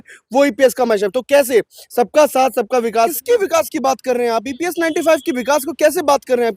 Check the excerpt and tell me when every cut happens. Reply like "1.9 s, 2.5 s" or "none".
3.1 s